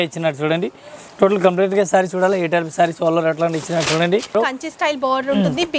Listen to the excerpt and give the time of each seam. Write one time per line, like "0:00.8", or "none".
0:04.3

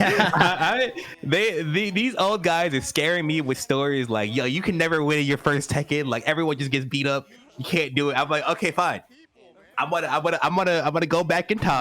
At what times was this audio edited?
none

